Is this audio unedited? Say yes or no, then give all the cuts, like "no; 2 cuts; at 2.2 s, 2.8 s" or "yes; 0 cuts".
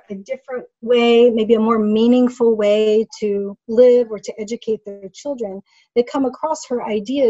yes; 0 cuts